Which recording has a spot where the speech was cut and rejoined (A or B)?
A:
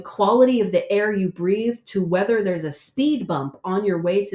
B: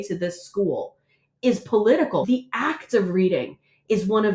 B